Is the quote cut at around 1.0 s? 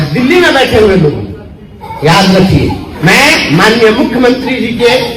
no; 1 cut; at 2.9 s

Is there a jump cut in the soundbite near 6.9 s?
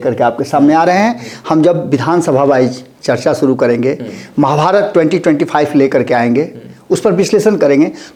no; 0 cuts

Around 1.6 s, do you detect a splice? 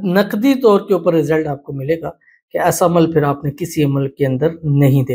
no; 0 cuts

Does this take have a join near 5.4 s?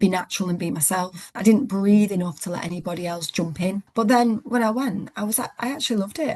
no; 2 cuts; at 1.2 s, 3.8 s

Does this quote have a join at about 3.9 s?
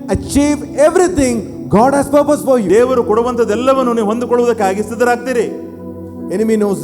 no; 1 cut; at 2.6 s

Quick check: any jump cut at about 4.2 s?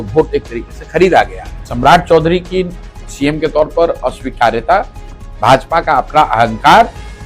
no; 1 cut; at 1.6 s

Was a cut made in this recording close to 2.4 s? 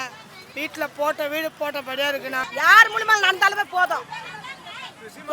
yes; 1 cut; at 2.4 s

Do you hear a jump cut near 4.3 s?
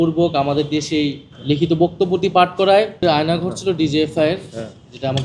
no; 2 cuts; at 1.3 s, 3.0 s

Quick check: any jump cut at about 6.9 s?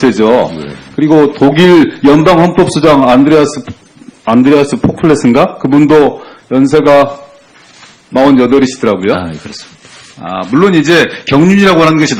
yes; 1 cut; at 6.9 s

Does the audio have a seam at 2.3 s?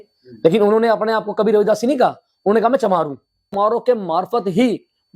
no; 1 cut; at 3.5 s

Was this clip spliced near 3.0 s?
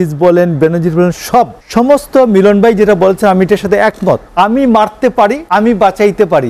no; 3 cuts; at 1.6 s, 4.3 s, 5.4 s

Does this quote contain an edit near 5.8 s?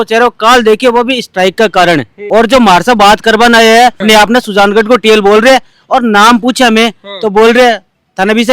no; 2 cuts; at 2.1 s, 4.0 s

